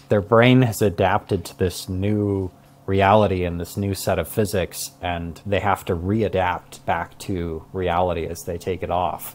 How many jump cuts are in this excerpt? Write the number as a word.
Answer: one